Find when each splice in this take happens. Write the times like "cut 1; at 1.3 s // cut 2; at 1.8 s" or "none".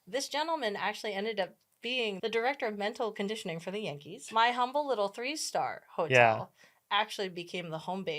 cut 1; at 2.2 s // cut 2; at 4.2 s